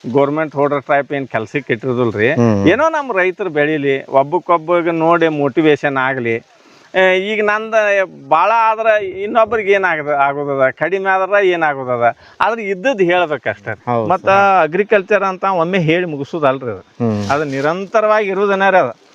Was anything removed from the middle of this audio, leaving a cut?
yes; 1 cut; at 14.1 s

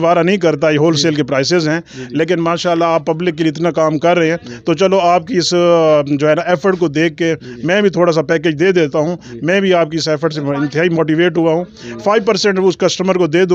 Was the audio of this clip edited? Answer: no; 0 cuts

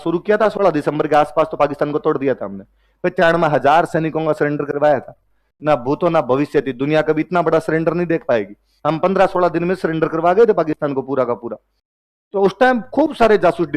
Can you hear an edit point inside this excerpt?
no; 0 cuts

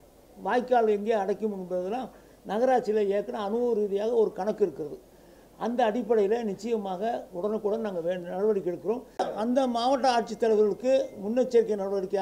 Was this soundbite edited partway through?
yes; 1 cut; at 9.2 s

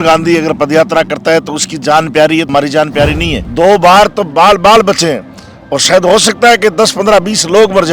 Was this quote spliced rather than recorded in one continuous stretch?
yes; 1 cut; at 3.1 s

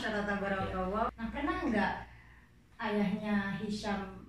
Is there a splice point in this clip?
yes; 1 cut; at 1.1 s

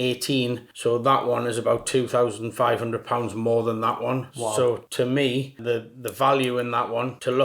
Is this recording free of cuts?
yes; 0 cuts

